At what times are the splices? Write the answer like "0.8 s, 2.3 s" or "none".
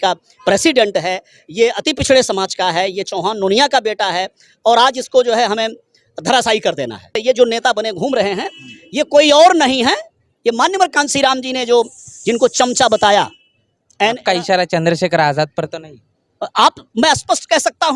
7.1 s